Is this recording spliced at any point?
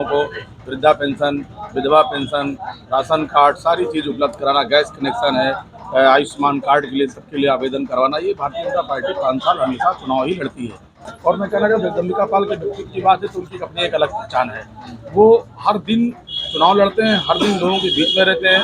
no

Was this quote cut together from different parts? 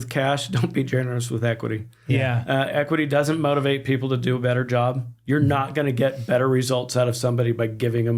no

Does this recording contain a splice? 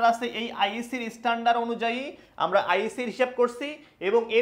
no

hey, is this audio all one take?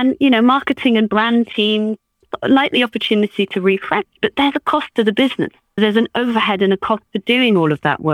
no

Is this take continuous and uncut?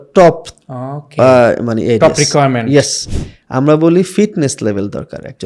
no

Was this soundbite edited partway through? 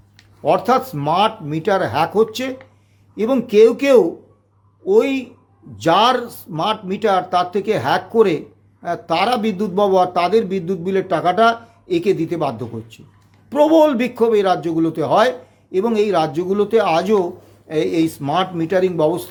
no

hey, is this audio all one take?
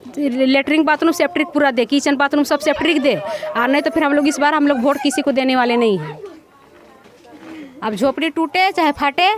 yes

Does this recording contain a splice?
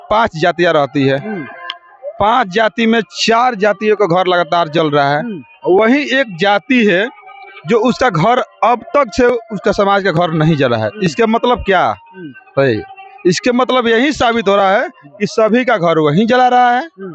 no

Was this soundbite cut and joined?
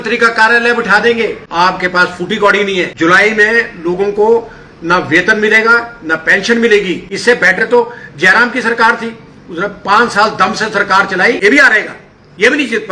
yes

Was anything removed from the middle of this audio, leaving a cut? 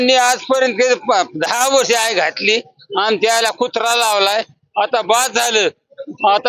no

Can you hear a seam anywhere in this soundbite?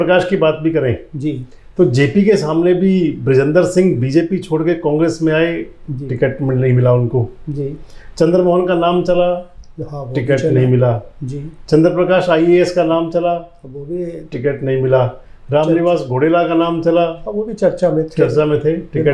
no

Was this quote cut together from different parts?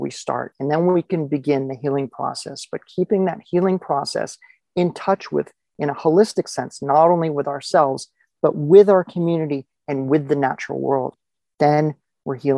yes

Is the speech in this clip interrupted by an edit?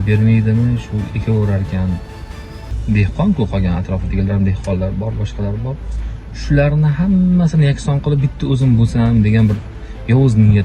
yes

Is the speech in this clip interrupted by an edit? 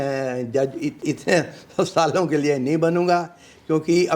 yes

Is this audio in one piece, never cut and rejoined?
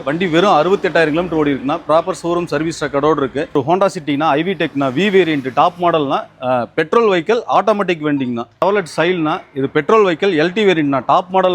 no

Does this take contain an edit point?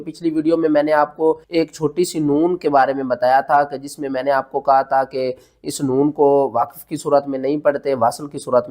yes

